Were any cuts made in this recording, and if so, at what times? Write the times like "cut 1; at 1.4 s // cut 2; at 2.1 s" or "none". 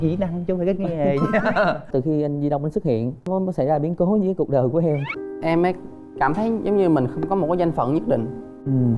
cut 1; at 1.9 s // cut 2; at 3.3 s // cut 3; at 5.2 s